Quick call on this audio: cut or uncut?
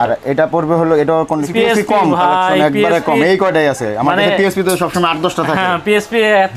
cut